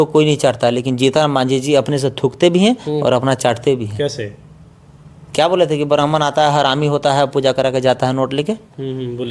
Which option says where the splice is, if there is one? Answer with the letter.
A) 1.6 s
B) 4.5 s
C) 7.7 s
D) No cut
D